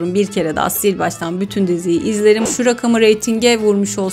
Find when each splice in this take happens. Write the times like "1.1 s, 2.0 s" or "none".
2.4 s